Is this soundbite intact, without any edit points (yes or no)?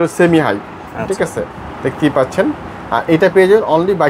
yes